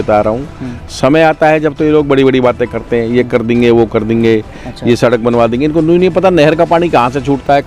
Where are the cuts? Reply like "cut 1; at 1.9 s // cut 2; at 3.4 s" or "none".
none